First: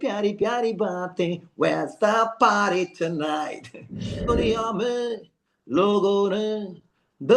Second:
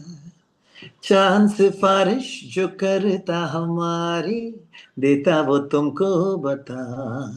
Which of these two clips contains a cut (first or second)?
first